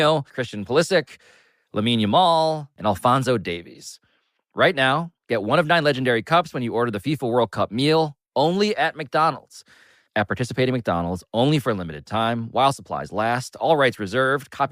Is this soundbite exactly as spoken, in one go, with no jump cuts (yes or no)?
yes